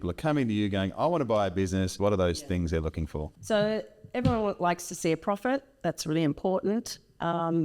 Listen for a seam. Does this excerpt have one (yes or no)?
yes